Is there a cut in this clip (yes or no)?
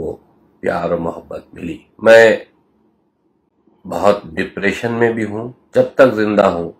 yes